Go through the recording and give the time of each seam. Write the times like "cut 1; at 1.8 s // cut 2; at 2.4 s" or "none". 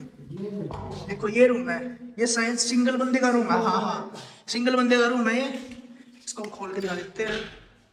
none

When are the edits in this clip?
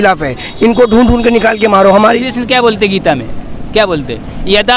cut 1; at 2.0 s

